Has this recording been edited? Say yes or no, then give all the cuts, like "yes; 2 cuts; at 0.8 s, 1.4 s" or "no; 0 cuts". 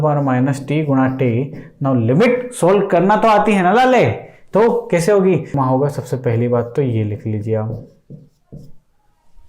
yes; 1 cut; at 5.5 s